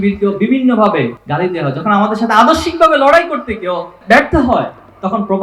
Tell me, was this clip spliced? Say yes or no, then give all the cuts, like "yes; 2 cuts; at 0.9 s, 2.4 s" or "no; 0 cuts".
yes; 2 cuts; at 1.2 s, 4.0 s